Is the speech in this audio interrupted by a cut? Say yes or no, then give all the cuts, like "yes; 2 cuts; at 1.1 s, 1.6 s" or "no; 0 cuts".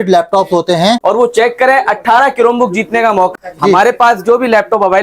yes; 2 cuts; at 1.0 s, 3.3 s